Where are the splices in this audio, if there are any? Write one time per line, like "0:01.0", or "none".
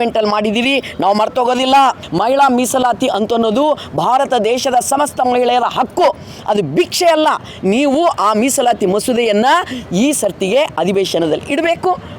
0:02.0